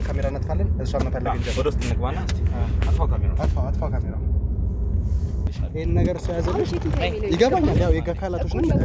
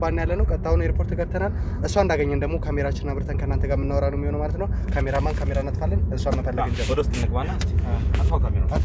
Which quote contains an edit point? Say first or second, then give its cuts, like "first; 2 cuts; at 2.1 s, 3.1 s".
first; 1 cut; at 5.6 s